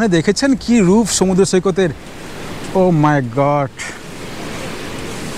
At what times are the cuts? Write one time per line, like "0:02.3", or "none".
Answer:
none